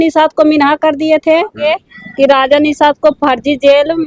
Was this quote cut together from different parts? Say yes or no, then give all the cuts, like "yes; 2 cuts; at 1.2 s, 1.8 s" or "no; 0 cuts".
yes; 1 cut; at 1.6 s